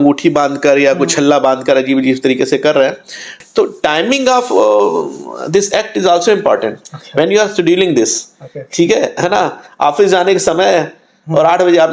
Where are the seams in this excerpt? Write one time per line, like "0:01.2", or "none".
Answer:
0:03.3